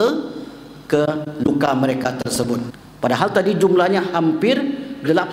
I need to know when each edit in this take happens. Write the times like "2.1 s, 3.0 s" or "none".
2.8 s